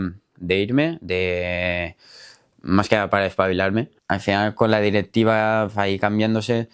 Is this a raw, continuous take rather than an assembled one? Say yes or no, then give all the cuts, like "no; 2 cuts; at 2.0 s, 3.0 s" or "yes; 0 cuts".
no; 1 cut; at 4.0 s